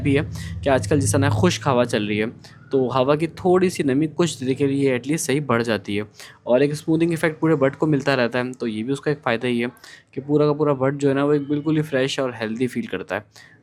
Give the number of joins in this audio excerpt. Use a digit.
0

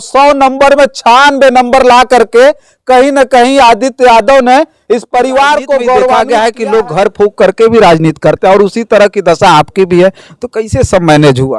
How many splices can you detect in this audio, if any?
1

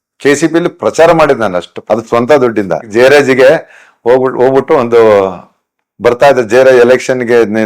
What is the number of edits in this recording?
1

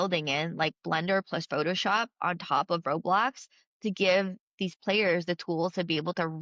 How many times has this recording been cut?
0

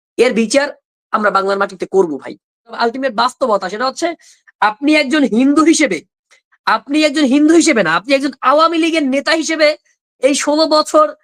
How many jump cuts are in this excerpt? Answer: 1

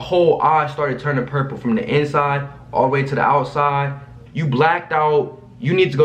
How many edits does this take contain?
1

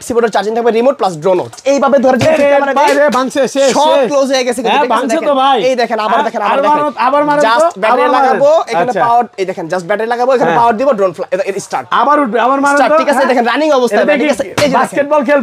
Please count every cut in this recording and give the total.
1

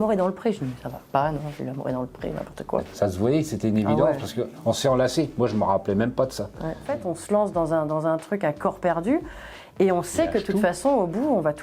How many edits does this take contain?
2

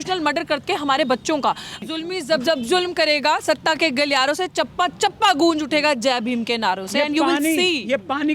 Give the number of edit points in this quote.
1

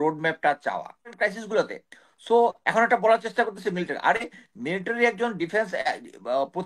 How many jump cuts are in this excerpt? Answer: 1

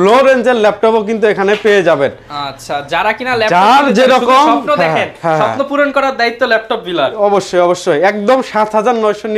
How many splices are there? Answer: 0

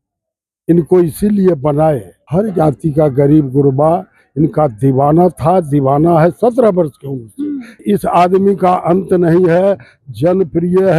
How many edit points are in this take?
2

